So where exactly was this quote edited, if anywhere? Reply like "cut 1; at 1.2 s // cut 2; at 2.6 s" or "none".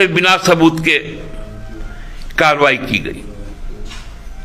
none